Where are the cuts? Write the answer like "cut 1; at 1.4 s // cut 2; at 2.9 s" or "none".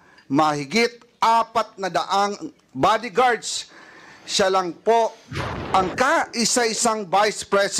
cut 1; at 2.6 s

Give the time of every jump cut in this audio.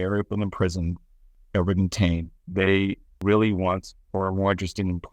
cut 1; at 3.2 s

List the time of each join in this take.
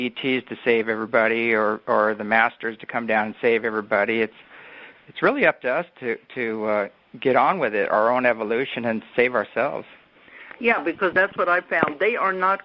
none

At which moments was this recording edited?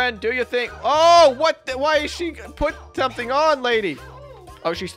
none

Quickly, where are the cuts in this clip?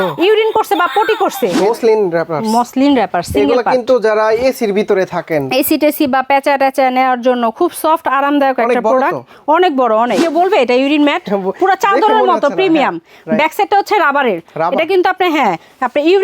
cut 1; at 1.6 s // cut 2; at 10.2 s

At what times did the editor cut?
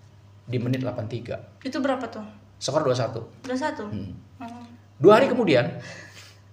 none

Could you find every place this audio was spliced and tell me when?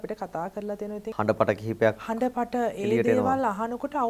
cut 1; at 1.0 s

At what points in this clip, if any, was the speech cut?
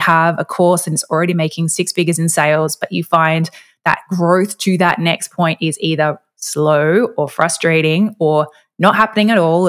none

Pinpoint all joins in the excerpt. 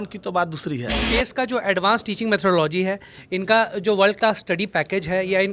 cut 1; at 1.0 s

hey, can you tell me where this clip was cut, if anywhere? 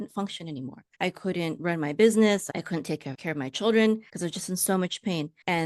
cut 1; at 2.5 s

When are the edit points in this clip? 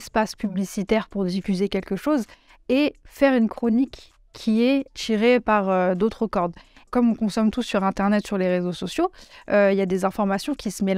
cut 1; at 5.0 s // cut 2; at 6.9 s

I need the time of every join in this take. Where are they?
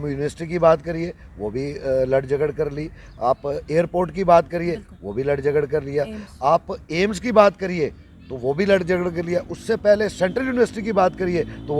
none

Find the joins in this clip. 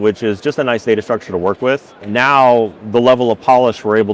cut 1; at 2.0 s

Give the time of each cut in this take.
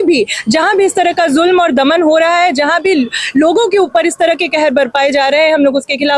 none

